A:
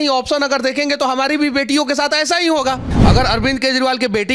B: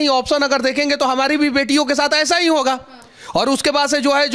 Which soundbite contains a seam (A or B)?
A